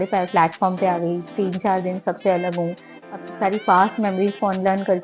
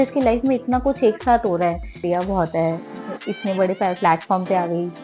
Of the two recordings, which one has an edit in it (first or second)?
second